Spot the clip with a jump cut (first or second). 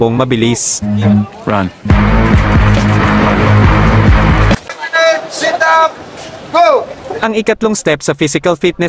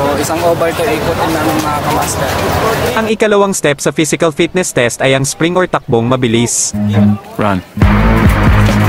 first